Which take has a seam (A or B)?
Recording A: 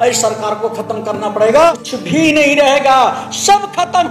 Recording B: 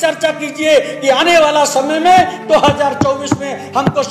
A